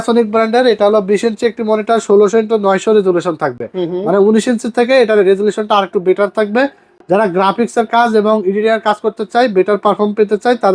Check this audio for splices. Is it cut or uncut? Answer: uncut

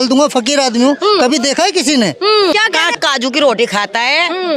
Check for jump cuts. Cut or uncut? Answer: cut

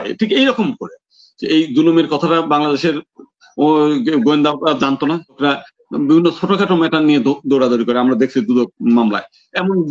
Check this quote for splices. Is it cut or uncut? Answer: cut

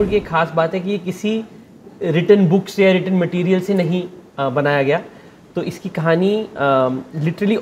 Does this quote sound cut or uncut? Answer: uncut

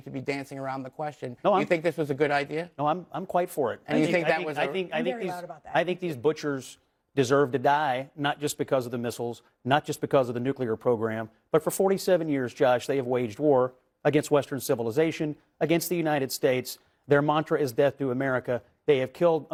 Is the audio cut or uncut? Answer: uncut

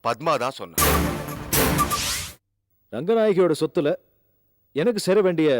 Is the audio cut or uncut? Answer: cut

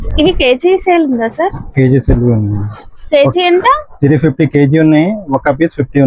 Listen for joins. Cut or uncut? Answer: uncut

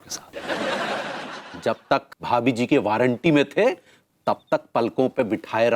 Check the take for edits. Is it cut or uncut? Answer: cut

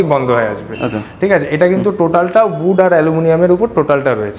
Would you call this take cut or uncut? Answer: uncut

